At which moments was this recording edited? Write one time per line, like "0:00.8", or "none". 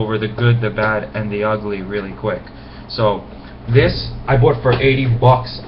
0:04.4